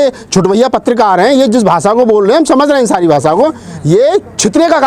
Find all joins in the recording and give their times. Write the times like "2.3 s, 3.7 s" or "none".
none

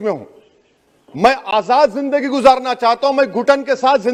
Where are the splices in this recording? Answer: none

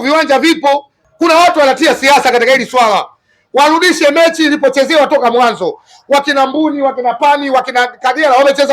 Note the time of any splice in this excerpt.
0.9 s

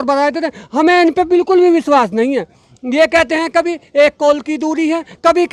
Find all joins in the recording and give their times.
none

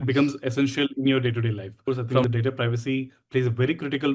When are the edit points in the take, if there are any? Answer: 2.1 s

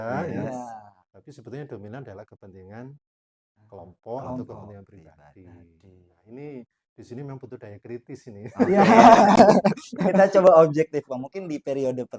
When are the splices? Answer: 9.4 s

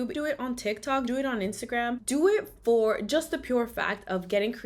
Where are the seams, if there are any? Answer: none

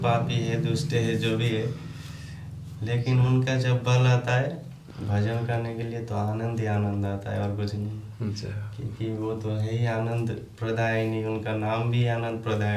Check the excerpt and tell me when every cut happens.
none

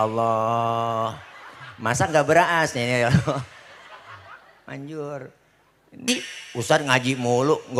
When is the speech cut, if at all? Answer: 6.0 s

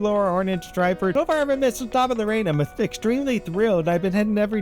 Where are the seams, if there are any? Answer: 1.1 s

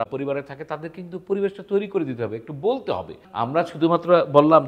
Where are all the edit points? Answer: 3.2 s

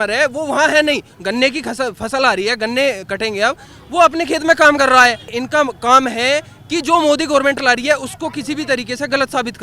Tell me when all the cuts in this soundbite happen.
5.4 s

